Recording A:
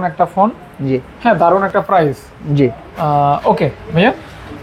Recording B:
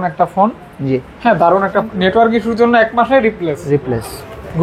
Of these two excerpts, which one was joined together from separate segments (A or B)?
B